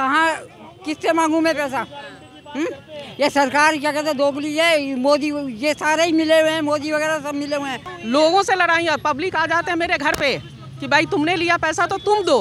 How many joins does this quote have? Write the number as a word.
one